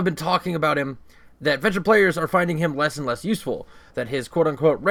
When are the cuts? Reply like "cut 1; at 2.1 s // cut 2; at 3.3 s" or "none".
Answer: none